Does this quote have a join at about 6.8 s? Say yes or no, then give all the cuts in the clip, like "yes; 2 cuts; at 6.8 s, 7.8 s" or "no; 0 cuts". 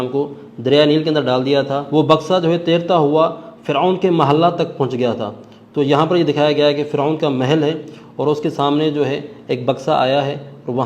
no; 1 cut; at 1.8 s